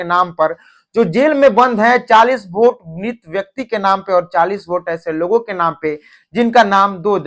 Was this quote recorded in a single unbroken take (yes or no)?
yes